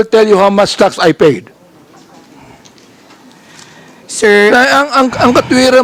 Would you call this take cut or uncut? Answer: uncut